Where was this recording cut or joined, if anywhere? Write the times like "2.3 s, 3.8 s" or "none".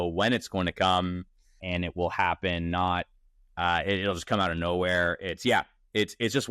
1.6 s, 3.4 s